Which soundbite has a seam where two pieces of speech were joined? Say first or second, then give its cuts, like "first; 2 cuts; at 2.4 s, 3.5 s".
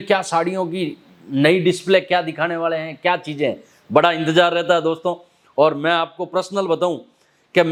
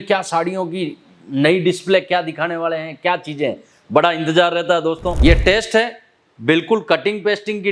second; 1 cut; at 5.2 s